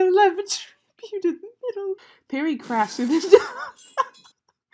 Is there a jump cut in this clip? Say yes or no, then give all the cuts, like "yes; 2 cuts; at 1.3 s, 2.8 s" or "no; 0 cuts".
yes; 1 cut; at 2.1 s